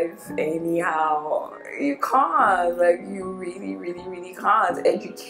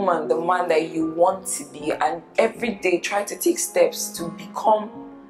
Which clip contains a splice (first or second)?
second